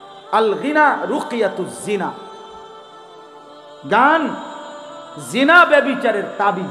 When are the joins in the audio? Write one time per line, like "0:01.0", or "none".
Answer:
0:02.5
0:03.8